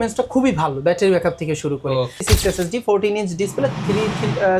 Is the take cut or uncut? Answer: cut